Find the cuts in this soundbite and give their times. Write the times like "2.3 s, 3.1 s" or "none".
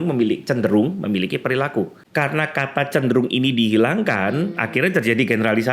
2.0 s